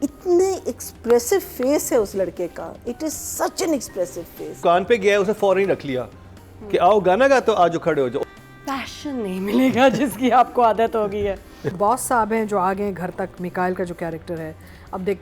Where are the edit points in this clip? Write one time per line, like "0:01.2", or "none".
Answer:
0:04.6
0:08.2
0:11.7